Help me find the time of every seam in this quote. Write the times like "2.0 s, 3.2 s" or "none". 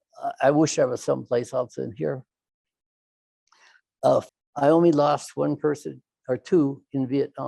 4.3 s